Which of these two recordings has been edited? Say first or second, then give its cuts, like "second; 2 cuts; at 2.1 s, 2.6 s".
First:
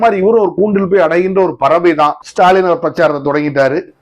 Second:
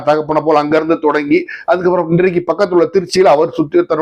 first; 1 cut; at 2.2 s